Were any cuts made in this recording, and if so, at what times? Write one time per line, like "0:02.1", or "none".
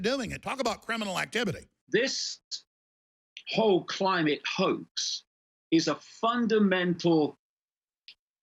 0:01.8